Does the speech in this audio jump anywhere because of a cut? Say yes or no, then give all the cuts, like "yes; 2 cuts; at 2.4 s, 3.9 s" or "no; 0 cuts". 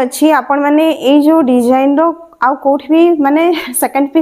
no; 0 cuts